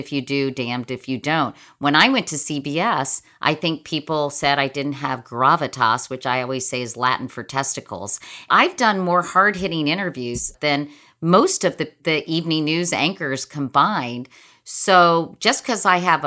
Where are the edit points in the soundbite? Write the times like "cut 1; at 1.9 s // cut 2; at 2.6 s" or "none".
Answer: cut 1; at 8.5 s // cut 2; at 10.5 s // cut 3; at 12.0 s